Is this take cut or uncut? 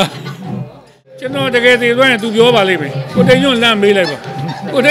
cut